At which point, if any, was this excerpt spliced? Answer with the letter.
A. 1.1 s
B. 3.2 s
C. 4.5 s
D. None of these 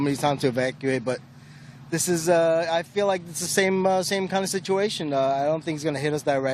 A